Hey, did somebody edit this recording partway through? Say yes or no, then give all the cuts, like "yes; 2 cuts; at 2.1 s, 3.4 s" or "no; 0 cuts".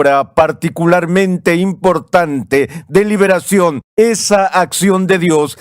yes; 1 cut; at 3.8 s